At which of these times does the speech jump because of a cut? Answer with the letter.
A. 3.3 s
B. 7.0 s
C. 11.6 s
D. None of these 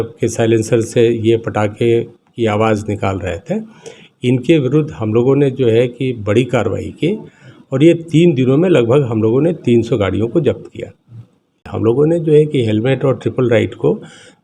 C